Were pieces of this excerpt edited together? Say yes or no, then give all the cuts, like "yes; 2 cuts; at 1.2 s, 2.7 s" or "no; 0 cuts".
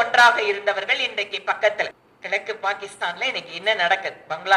yes; 1 cut; at 2.1 s